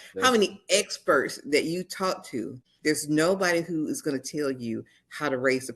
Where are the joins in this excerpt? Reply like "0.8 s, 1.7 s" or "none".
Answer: 2.6 s